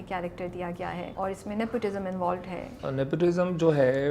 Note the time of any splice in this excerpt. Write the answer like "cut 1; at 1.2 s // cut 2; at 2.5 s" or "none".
cut 1; at 1.1 s // cut 2; at 2.8 s